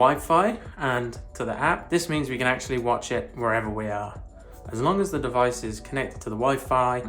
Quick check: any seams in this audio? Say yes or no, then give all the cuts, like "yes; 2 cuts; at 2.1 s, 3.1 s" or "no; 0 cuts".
yes; 1 cut; at 1.8 s